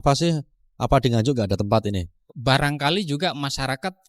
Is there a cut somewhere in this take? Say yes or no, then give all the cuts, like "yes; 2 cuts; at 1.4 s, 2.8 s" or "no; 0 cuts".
yes; 1 cut; at 2.4 s